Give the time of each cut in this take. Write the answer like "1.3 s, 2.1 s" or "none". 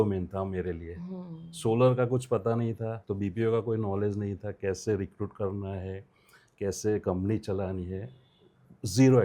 3.0 s

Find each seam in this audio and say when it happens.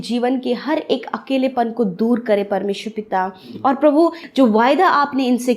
4.2 s

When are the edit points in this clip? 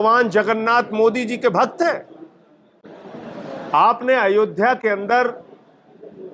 none

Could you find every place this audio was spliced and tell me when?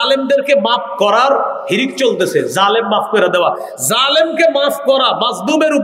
none

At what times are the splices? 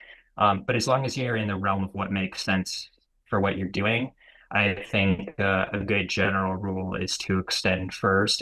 none

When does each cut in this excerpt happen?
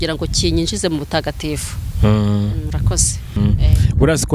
3.4 s

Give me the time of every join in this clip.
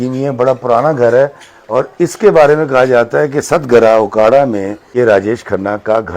4.8 s

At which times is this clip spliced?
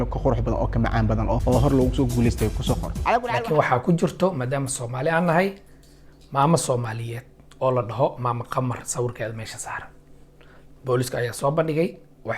3.5 s

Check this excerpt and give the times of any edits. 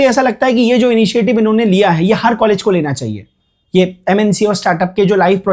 none

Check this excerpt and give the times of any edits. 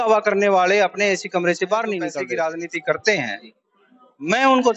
2.2 s

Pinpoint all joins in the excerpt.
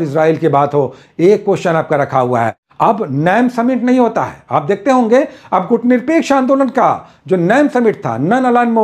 2.6 s

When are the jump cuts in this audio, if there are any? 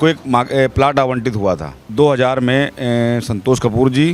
1.8 s

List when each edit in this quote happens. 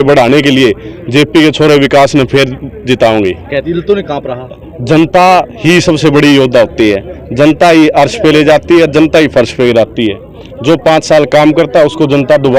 3.6 s

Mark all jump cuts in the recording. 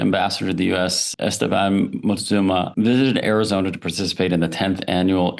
1.1 s, 2.7 s

